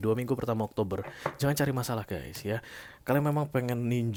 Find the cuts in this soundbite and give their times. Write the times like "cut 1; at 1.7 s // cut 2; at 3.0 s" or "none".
none